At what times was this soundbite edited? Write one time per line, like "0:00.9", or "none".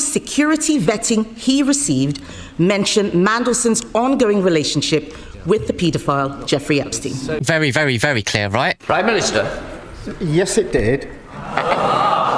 none